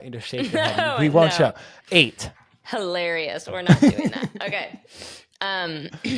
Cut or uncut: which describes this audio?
uncut